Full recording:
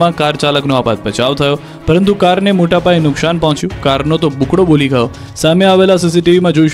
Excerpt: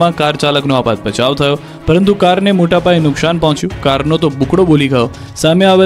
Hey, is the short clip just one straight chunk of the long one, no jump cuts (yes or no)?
yes